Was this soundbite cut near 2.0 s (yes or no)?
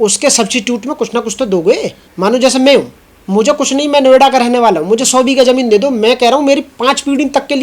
yes